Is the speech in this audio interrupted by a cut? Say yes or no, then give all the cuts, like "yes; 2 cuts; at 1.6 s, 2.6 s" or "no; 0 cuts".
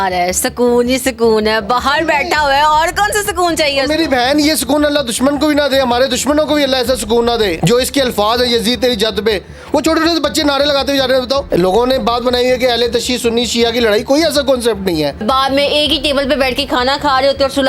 yes; 3 cuts; at 7.6 s, 11.4 s, 15.2 s